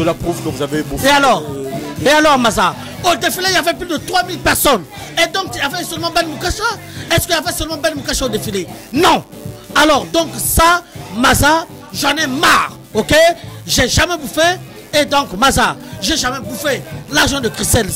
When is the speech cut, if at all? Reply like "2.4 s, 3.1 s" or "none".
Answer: none

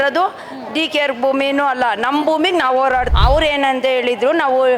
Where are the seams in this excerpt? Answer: 3.1 s

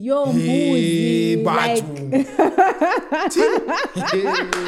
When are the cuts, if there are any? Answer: none

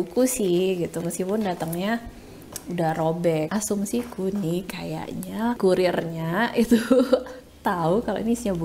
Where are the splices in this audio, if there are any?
3.5 s, 5.6 s

